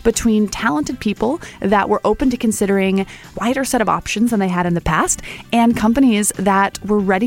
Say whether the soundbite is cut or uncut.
cut